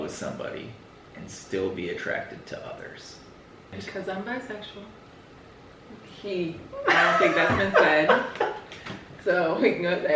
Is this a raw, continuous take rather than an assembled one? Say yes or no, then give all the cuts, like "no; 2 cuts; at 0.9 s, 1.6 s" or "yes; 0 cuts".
no; 1 cut; at 3.7 s